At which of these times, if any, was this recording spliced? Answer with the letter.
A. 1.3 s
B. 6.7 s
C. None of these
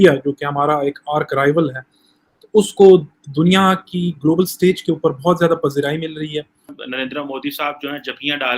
B